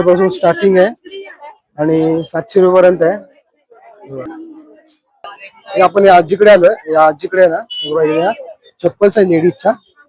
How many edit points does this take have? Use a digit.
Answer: 1